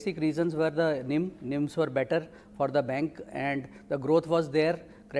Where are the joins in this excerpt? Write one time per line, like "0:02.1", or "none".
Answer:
0:02.9